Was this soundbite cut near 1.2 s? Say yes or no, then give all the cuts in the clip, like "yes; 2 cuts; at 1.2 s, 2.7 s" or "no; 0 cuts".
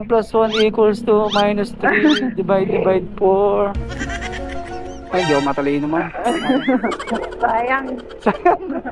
no; 1 cut; at 8.0 s